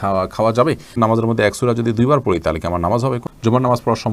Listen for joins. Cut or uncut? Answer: cut